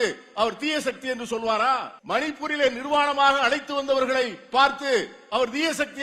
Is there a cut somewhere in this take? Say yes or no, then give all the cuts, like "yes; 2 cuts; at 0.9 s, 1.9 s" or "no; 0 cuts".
yes; 1 cut; at 1.9 s